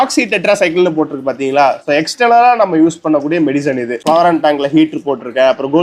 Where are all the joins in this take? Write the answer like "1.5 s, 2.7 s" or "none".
4.0 s